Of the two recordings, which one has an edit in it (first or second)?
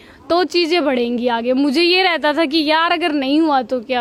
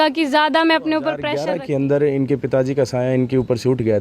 second